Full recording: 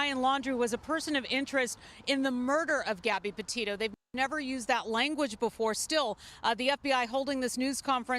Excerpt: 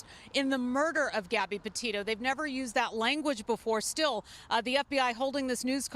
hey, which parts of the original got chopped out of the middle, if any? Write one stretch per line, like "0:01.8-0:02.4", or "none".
0:03.9-0:04.1